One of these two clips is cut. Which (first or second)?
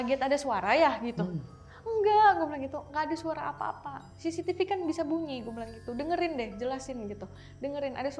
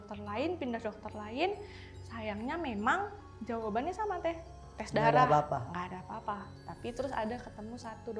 first